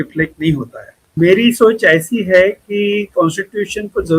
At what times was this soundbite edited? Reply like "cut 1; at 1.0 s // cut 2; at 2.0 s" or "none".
cut 1; at 1.0 s